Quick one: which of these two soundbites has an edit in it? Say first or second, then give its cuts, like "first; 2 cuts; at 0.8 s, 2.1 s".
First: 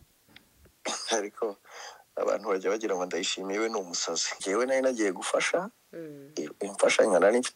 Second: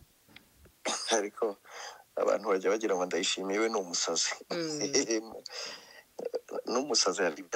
first; 1 cut; at 4.3 s